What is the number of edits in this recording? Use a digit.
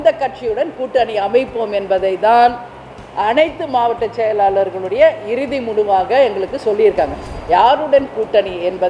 1